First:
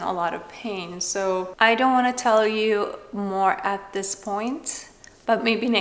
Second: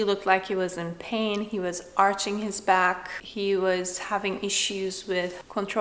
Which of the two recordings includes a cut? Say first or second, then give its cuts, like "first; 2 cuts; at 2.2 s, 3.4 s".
first; 1 cut; at 1.5 s